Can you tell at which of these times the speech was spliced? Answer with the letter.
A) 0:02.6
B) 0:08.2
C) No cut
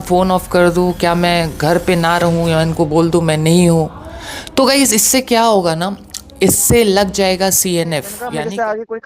B